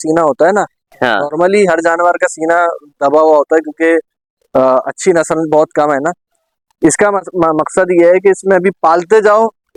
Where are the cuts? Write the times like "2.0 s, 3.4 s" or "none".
none